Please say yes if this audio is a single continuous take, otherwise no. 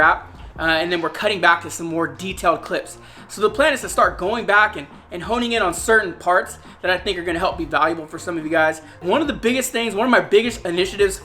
no